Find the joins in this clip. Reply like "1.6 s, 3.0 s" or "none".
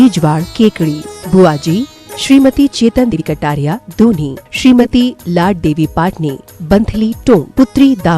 3.2 s